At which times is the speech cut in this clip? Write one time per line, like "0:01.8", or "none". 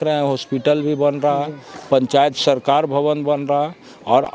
none